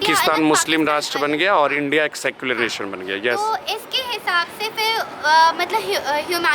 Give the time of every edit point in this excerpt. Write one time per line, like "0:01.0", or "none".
none